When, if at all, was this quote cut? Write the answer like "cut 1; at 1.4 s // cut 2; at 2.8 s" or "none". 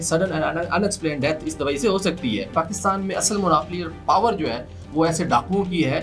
cut 1; at 2.5 s